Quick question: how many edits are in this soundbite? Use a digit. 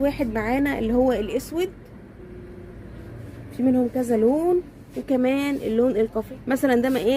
1